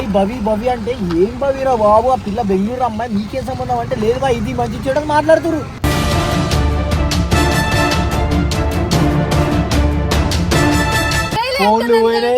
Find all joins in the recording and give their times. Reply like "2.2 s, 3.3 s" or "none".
11.3 s